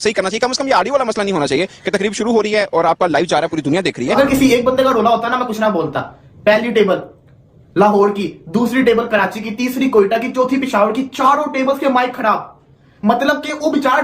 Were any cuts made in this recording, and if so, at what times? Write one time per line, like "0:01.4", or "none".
0:04.1